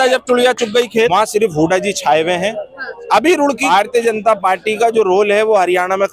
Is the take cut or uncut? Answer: cut